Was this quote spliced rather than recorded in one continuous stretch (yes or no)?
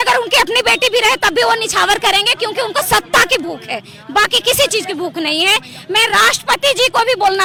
no